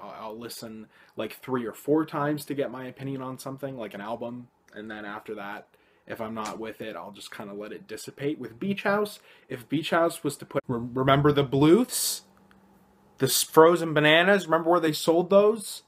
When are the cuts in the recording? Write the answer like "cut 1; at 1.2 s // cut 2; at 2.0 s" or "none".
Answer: none